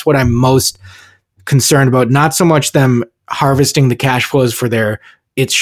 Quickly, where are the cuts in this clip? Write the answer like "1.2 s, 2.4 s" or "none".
none